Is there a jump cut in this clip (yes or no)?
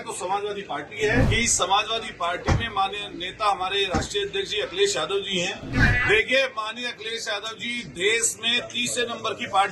yes